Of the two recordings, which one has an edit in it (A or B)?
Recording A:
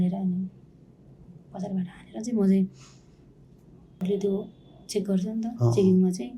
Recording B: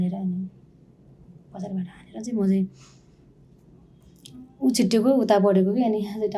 A